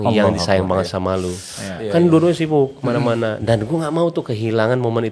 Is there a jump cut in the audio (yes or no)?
no